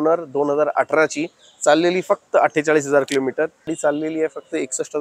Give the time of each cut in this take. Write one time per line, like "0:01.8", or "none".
0:03.7